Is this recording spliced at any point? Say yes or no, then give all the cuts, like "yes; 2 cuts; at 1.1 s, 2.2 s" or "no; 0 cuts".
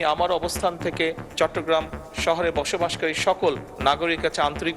no; 0 cuts